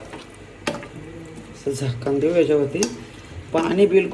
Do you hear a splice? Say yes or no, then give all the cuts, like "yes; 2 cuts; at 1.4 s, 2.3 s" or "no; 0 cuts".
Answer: no; 0 cuts